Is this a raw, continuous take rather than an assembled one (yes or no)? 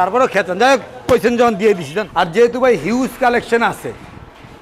no